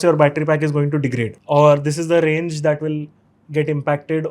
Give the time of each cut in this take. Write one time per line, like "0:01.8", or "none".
0:01.3